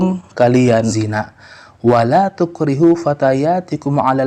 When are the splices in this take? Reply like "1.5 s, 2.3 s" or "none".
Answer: 0.9 s